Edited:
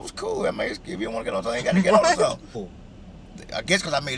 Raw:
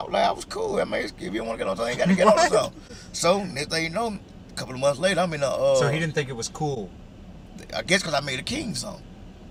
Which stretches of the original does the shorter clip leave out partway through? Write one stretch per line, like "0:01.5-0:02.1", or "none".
0:03.0-0:06.9